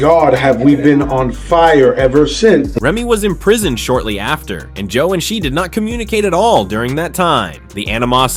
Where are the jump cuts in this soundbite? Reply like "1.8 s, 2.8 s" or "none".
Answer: none